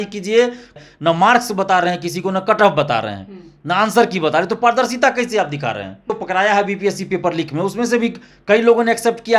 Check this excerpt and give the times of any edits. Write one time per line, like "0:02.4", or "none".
0:00.8
0:06.2